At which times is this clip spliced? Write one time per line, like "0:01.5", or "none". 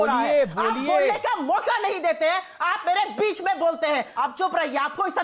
0:04.1